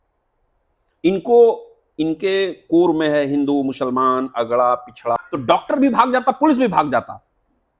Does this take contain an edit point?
yes; 1 cut; at 5.2 s

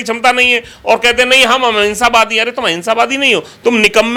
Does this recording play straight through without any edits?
yes; 0 cuts

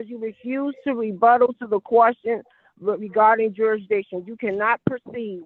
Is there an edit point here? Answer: no; 0 cuts

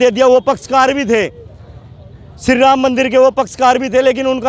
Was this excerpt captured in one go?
yes; 0 cuts

